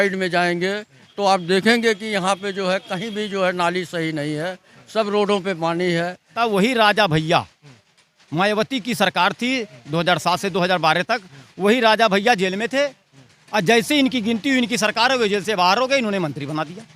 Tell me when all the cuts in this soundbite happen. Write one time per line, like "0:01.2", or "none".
0:06.3